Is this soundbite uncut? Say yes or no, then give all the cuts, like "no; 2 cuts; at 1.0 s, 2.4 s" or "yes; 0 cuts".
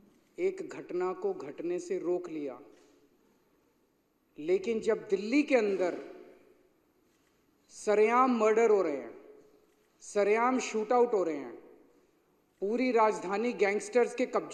yes; 0 cuts